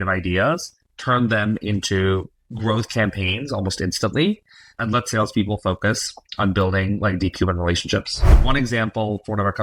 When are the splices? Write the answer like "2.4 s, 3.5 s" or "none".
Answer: 2.4 s, 8.3 s